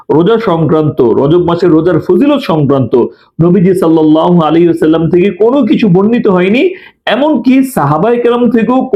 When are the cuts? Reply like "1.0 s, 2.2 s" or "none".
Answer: none